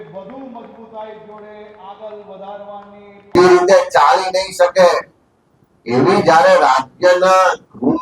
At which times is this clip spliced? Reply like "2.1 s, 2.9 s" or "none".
3.3 s